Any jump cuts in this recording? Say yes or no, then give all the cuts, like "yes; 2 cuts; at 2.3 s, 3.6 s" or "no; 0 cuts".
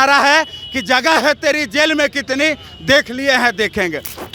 no; 0 cuts